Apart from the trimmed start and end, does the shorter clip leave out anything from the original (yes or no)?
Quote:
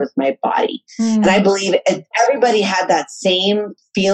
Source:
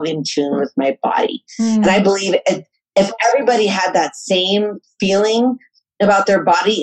yes